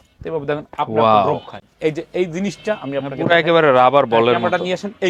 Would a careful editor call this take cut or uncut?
uncut